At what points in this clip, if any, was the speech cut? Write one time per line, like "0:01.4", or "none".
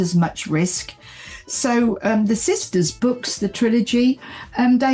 0:03.0